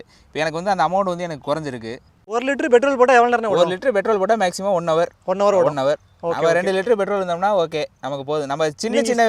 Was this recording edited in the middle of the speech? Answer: no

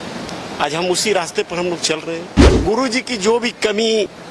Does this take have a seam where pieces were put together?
yes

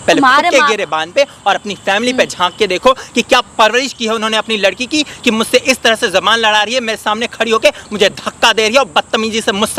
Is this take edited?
no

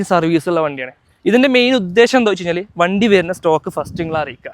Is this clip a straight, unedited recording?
no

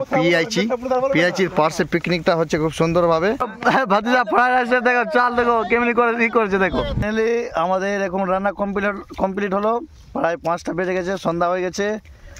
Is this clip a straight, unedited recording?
no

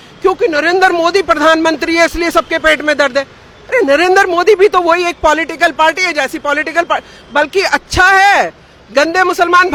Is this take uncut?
yes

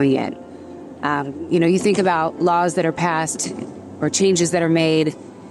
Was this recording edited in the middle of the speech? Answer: no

